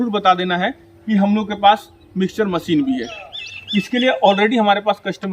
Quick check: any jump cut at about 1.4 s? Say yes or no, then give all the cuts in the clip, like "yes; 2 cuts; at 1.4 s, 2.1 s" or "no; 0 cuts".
no; 1 cut; at 3.4 s